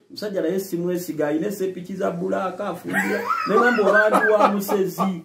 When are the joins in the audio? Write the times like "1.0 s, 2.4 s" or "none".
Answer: none